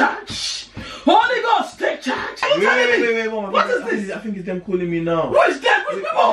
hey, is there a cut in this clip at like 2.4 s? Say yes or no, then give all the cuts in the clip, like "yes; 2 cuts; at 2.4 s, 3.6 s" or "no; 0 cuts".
yes; 1 cut; at 2.4 s